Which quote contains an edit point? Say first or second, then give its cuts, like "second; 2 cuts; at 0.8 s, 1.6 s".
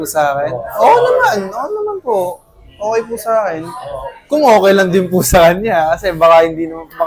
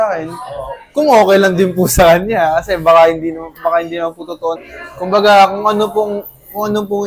second; 1 cut; at 4.7 s